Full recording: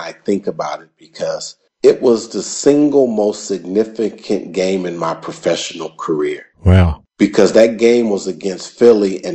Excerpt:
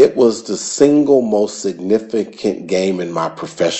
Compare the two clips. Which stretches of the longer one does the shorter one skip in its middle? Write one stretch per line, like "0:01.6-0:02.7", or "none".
none

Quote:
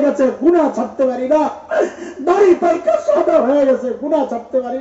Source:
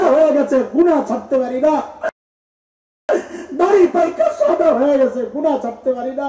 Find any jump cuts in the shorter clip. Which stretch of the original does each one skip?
0:02.0-0:03.0

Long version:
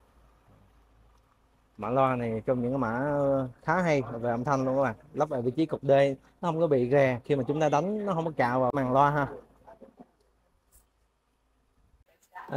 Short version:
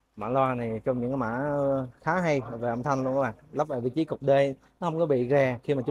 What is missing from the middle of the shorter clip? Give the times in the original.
none

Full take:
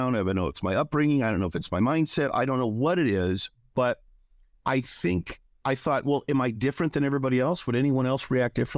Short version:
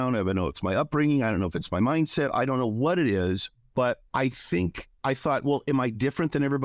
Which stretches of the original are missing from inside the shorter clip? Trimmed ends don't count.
0:04.6-0:05.2

